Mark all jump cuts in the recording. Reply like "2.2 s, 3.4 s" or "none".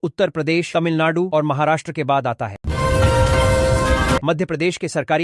2.6 s, 4.2 s